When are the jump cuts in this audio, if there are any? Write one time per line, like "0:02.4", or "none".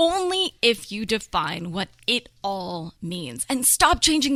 none